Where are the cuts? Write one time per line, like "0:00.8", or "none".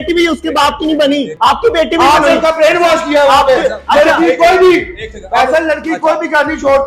0:01.3